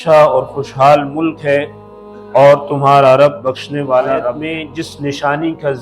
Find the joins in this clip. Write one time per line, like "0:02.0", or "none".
0:04.4

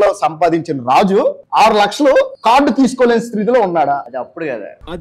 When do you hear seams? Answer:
0:01.4
0:02.4
0:04.1

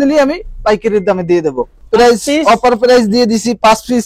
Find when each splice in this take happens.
0:01.8

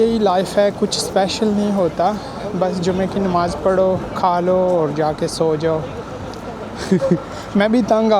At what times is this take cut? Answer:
none

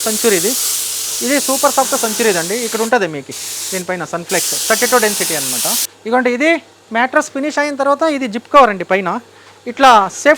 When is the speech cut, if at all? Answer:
0:05.9

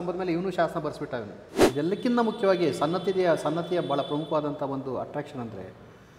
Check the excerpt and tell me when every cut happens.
0:01.5

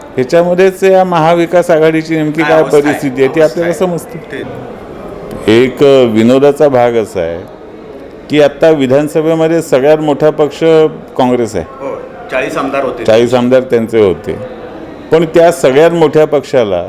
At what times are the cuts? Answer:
0:04.6

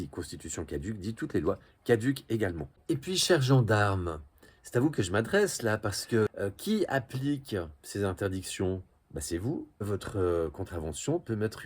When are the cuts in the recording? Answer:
0:02.7
0:06.3
0:09.9

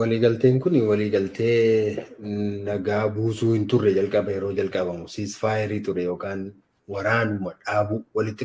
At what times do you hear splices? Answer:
none

